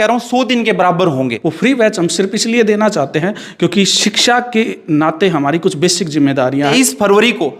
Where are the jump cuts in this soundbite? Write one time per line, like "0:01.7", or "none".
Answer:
0:01.4
0:06.5

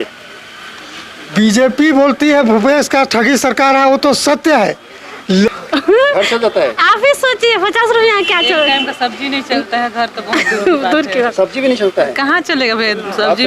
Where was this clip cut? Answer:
0:05.5

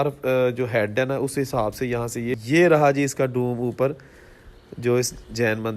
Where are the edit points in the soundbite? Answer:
0:02.4

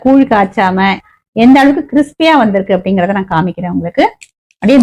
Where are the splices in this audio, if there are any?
0:01.0

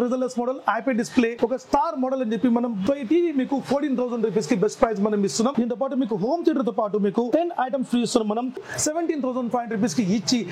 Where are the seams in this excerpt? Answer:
0:02.8
0:05.5
0:08.6

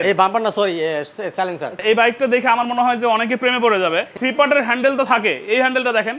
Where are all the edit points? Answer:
0:01.7
0:04.1

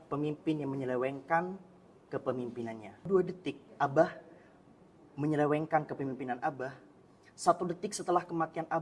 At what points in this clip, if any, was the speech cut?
0:03.1

